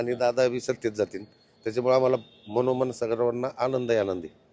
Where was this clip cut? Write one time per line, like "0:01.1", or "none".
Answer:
none